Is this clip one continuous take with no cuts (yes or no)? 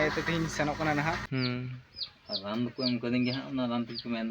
no